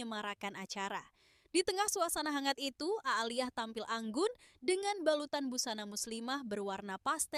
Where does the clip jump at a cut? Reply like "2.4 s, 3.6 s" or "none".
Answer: none